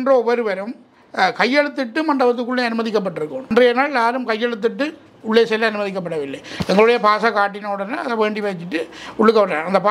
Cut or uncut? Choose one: cut